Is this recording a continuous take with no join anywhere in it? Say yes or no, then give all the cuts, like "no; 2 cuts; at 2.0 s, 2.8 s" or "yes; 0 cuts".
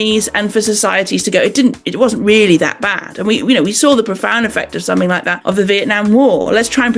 no; 1 cut; at 5.3 s